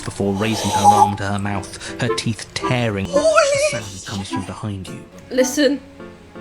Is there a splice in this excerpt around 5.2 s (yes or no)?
yes